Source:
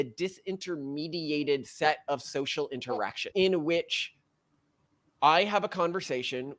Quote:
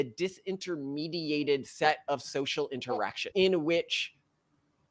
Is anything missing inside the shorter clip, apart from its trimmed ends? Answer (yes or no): no